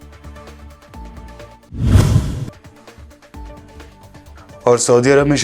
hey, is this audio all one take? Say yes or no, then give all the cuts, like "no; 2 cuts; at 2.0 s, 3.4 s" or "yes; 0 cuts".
no; 1 cut; at 1.3 s